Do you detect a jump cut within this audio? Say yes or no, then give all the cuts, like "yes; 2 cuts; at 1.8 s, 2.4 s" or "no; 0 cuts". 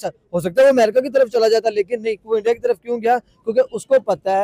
no; 0 cuts